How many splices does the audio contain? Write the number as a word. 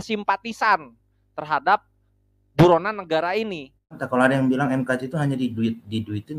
one